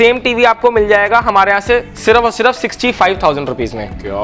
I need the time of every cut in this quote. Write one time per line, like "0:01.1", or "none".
none